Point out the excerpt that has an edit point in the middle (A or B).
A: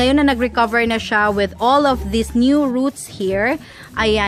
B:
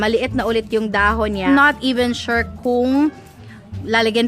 B